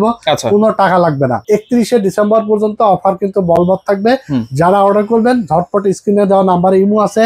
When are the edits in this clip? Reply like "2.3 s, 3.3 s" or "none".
1.4 s